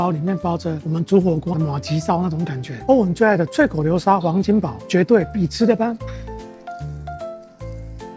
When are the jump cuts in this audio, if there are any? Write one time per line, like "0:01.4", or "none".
none